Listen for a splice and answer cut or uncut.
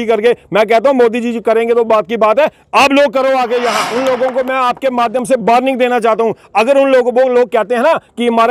cut